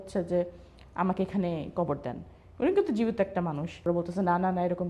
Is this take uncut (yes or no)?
no